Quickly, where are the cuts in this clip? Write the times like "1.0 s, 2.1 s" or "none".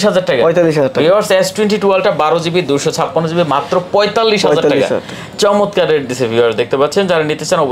none